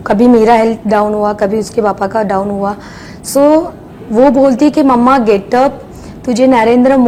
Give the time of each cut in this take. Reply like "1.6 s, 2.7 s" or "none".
none